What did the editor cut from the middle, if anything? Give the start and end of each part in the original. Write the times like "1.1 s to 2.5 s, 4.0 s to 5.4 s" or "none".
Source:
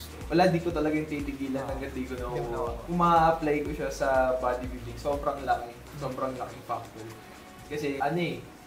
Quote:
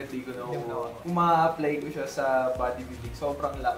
none